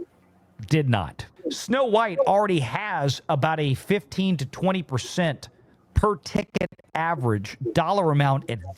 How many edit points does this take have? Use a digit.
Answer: 1